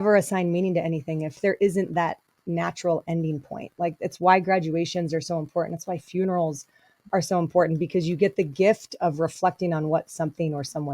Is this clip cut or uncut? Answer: cut